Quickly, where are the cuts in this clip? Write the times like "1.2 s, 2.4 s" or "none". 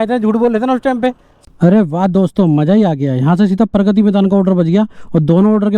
1.3 s